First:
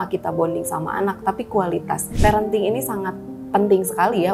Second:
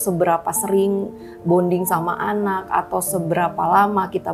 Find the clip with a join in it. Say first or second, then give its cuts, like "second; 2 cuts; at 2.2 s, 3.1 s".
first; 1 cut; at 2.1 s